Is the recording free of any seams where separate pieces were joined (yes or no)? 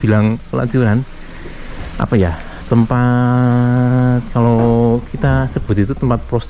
yes